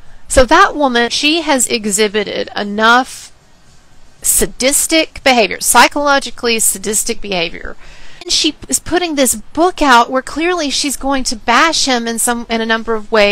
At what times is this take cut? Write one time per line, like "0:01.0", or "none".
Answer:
0:01.1
0:08.3